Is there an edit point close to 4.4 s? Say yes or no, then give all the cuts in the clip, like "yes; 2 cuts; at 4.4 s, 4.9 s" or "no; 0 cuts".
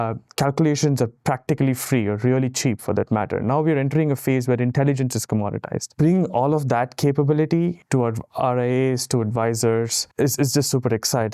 no; 3 cuts; at 5.8 s, 7.8 s, 10.0 s